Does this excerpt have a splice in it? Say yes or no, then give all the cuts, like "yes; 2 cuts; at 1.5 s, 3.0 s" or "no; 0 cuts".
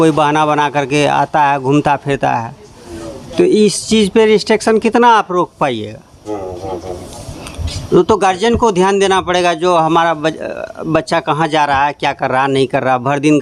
no; 0 cuts